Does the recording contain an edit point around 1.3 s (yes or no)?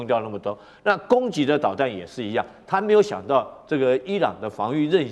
no